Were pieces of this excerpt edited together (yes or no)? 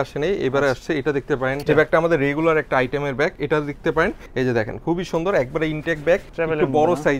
yes